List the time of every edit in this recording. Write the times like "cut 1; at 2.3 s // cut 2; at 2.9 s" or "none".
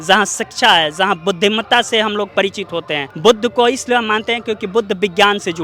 none